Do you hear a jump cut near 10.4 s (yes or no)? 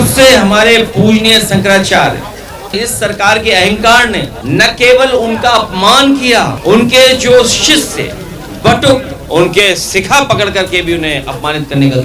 no